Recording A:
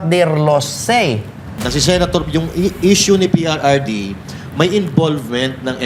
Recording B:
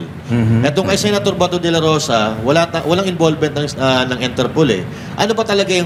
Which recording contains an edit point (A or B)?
A